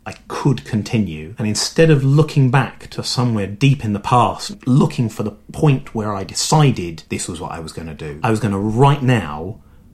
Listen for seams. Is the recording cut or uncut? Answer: cut